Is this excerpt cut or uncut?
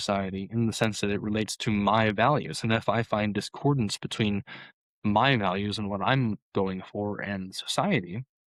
uncut